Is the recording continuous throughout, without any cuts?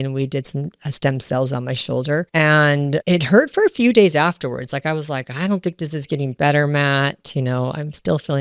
yes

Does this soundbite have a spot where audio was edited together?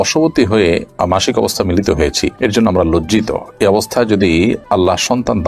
no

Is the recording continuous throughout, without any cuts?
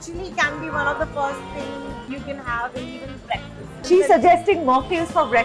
no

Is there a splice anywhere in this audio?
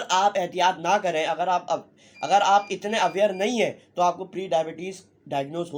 no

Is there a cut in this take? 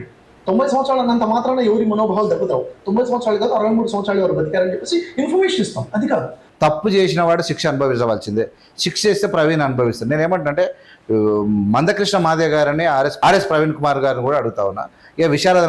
yes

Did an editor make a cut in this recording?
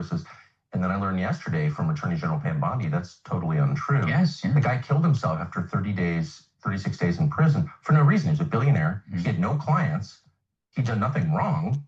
no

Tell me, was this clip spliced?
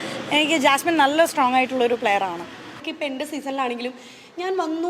yes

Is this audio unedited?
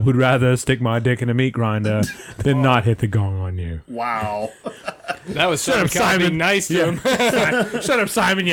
no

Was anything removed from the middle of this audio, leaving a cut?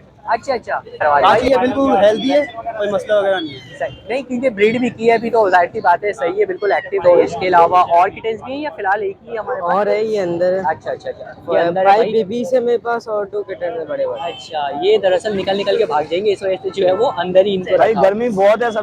yes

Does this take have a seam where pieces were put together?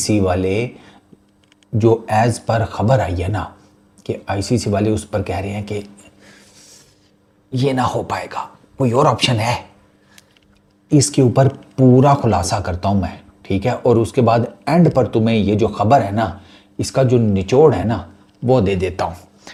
no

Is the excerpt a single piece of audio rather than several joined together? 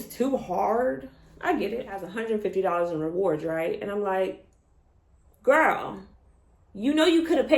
no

